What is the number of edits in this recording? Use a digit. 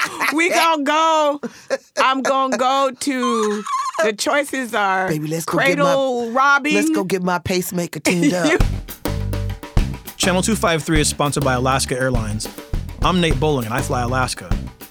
1